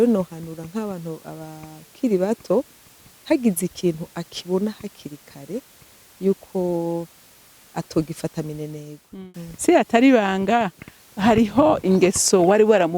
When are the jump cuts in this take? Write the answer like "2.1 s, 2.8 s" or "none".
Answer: 9.3 s